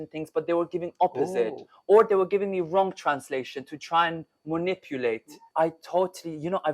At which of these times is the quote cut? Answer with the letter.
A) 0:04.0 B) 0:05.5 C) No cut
B